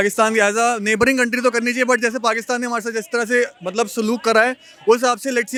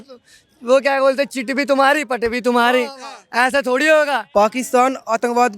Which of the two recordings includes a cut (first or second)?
second